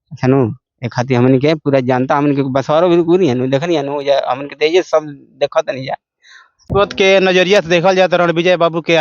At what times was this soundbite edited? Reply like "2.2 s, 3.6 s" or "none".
6.6 s